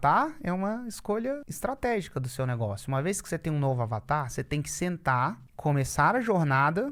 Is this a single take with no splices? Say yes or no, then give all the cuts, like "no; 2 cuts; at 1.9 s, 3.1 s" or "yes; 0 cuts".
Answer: no; 2 cuts; at 1.5 s, 5.5 s